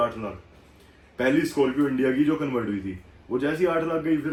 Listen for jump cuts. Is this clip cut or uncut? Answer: uncut